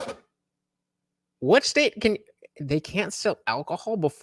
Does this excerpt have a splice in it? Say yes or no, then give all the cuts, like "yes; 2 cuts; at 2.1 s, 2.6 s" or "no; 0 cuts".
no; 0 cuts